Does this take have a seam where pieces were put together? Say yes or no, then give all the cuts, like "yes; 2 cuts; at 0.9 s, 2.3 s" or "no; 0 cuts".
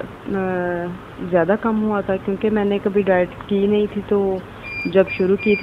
no; 0 cuts